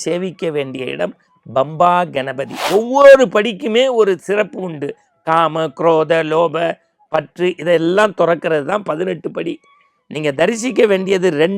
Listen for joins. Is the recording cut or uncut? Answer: cut